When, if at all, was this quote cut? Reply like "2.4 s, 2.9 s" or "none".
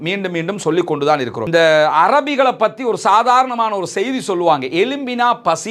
1.4 s